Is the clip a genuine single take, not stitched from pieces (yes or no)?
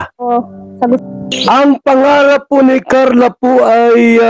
no